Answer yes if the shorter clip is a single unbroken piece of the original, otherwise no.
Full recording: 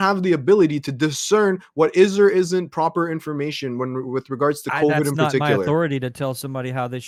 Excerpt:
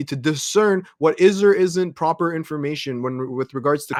yes